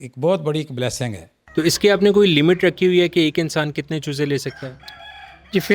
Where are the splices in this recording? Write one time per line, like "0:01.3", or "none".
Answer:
0:01.4